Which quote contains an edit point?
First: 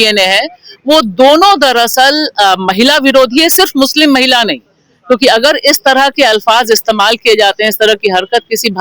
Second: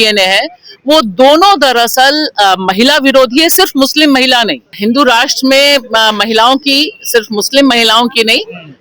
second; 1 cut; at 4.7 s

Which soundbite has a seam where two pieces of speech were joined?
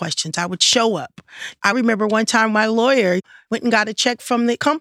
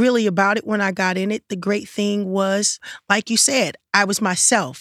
first; 1 cut; at 1.6 s

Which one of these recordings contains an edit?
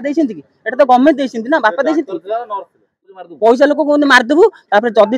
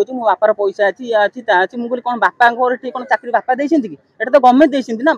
first; 1 cut; at 3.1 s

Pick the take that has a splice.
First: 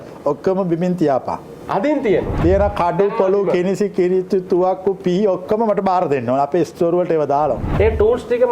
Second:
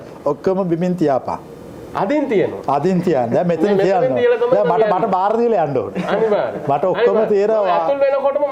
first; 4 cuts; at 1.5 s, 2.4 s, 6.7 s, 7.7 s

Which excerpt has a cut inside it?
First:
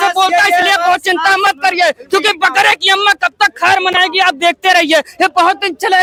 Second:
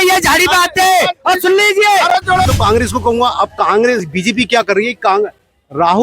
second; 1 cut; at 2.5 s

